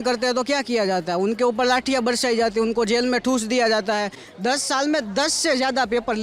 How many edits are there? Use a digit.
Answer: 1